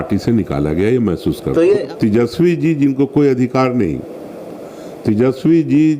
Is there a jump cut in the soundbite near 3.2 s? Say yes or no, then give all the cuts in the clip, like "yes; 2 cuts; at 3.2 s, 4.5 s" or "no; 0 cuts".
no; 1 cut; at 1.9 s